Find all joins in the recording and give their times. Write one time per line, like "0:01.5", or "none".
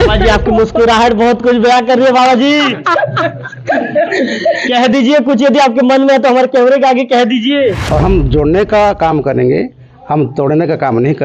0:07.8